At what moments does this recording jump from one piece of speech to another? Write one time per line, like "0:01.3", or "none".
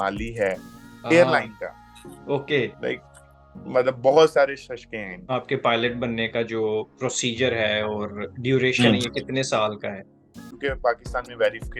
0:05.1
0:10.5